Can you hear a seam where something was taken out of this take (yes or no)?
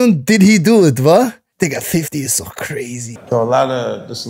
yes